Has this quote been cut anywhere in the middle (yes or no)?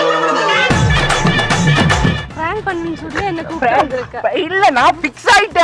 yes